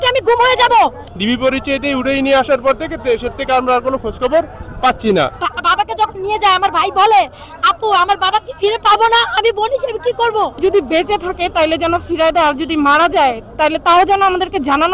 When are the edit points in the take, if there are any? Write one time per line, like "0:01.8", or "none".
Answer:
0:01.1
0:05.4
0:10.5